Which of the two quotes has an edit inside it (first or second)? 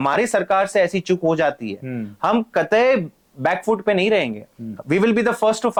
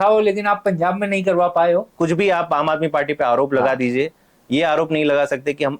second